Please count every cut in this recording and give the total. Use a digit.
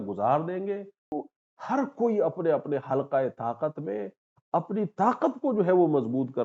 1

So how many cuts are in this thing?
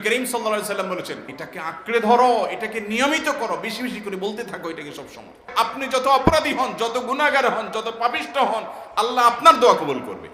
2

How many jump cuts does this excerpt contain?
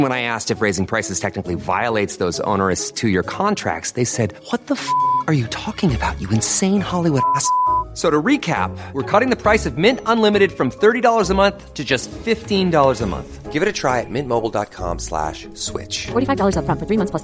0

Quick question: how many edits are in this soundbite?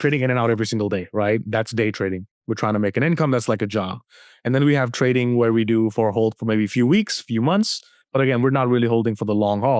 0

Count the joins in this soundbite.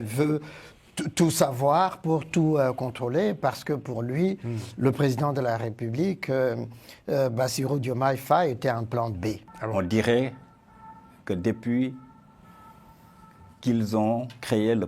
1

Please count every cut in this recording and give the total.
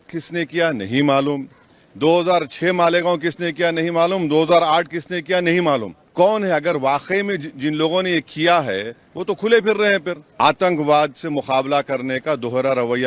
2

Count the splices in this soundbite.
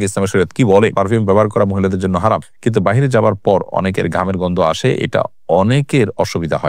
2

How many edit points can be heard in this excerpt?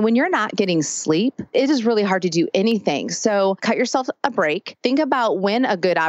3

